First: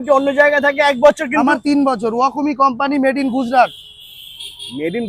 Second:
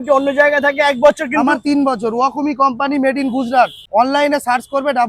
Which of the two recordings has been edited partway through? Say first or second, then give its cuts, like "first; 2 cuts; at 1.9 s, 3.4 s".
second; 1 cut; at 3.8 s